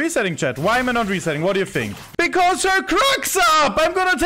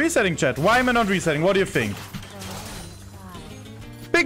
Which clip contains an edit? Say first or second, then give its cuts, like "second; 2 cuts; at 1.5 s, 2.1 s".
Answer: first; 1 cut; at 2.0 s